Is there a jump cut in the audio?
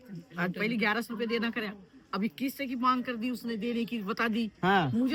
no; 0 cuts

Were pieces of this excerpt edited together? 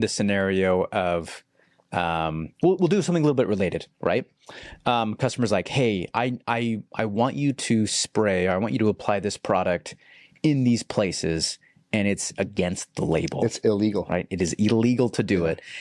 no; 0 cuts

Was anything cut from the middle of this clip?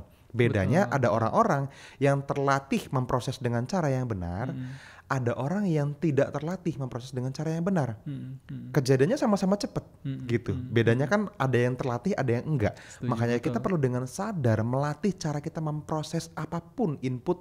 no; 0 cuts

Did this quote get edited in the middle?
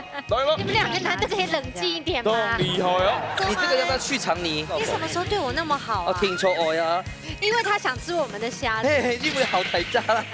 yes; 1 cut; at 3.3 s

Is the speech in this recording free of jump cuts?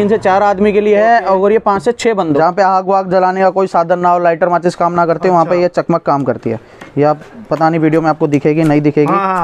no; 1 cut; at 2.3 s

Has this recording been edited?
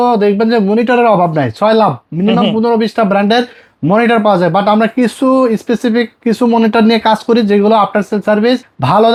no; 0 cuts

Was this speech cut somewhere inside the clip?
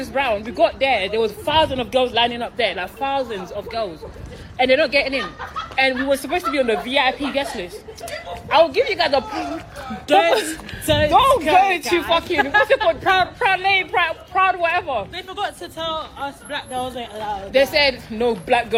no; 0 cuts

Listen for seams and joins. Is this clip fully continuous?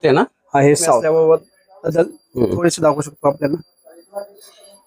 no; 1 cut; at 1.0 s

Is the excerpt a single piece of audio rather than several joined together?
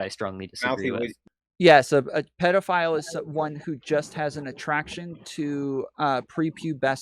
no; 1 cut; at 1.2 s

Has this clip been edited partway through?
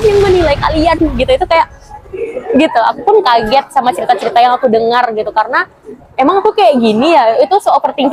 no; 0 cuts

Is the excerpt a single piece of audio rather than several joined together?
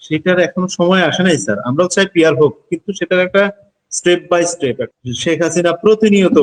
no; 1 cut; at 4.9 s

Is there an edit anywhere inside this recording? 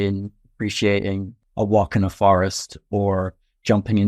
yes; 1 cut; at 1.3 s

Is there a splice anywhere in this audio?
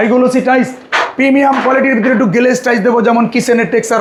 no; 0 cuts

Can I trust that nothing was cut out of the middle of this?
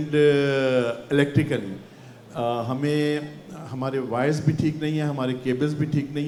yes; 0 cuts

